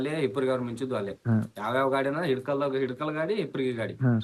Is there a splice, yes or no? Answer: no